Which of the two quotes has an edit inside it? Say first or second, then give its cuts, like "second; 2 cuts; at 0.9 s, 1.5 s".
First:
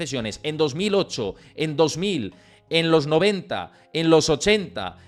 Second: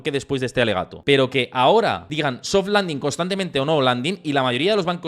second; 2 cuts; at 0.9 s, 2.0 s